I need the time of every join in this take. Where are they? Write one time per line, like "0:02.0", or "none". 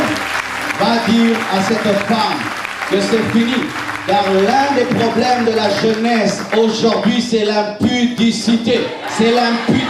none